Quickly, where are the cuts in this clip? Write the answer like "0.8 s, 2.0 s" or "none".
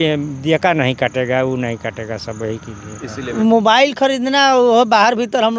3.4 s